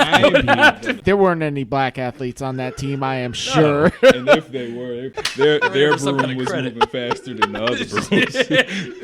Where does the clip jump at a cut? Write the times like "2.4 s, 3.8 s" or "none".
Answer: 1.0 s, 5.2 s